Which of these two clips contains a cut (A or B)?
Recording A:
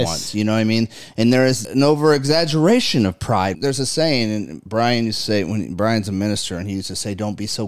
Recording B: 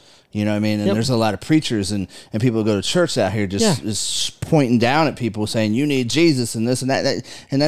A